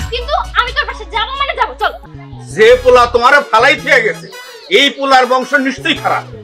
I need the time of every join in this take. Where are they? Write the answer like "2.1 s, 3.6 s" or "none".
2.0 s